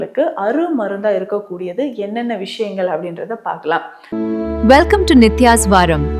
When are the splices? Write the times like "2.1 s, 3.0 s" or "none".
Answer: 4.0 s

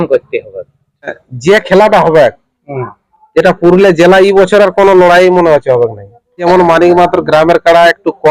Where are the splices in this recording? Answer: 1.3 s, 6.4 s

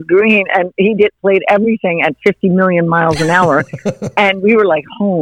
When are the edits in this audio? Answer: none

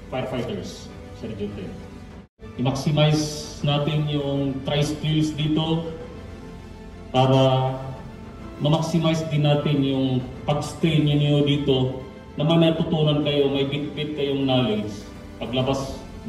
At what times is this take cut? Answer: 2.4 s

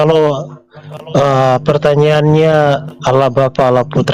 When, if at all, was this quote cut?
none

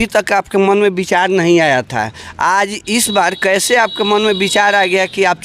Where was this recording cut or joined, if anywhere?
none

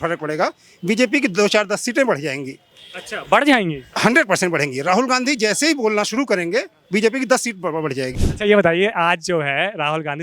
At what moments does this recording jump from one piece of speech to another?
8.1 s

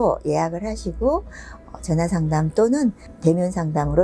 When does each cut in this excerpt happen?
3.1 s

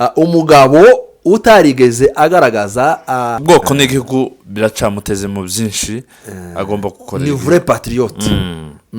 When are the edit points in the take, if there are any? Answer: 3.4 s

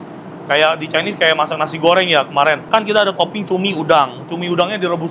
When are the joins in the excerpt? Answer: 2.6 s

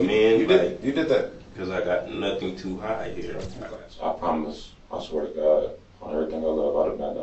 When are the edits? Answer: 3.5 s

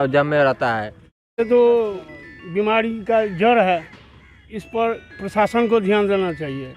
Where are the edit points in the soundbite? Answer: 1.4 s

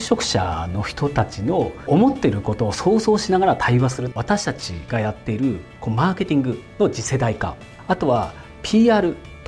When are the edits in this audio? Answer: 1.8 s, 4.1 s, 7.7 s

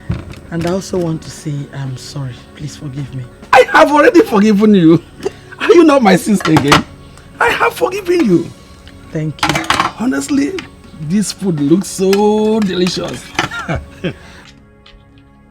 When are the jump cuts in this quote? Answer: 14.4 s

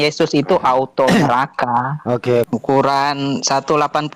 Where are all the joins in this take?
2.5 s

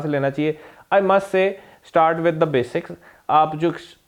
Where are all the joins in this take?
none

